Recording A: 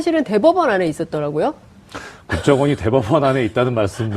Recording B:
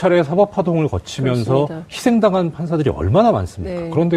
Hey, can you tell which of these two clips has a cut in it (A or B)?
A